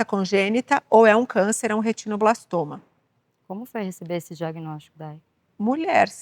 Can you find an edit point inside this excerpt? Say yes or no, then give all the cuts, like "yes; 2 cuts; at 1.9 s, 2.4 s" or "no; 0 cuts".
no; 0 cuts